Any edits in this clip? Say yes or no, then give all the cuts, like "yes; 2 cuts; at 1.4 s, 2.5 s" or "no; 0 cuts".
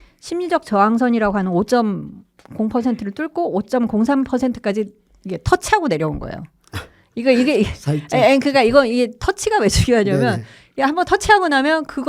no; 0 cuts